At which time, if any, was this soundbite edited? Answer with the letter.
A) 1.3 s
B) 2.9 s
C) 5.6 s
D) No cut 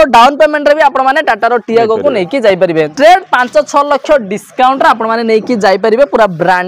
B